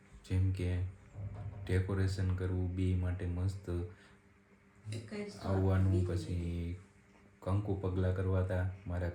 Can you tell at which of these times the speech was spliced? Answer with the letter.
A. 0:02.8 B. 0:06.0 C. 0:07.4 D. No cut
D